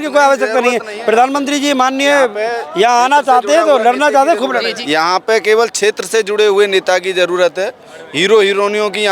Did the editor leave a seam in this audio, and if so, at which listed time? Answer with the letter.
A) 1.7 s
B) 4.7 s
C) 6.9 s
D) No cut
B